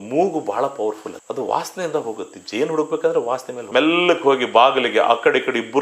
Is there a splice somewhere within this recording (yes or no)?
yes